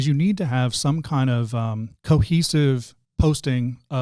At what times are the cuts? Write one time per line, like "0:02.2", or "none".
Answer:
0:01.9
0:03.0